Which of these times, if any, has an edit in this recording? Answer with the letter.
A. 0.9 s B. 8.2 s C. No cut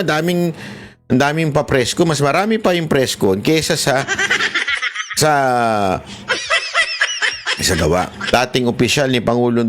B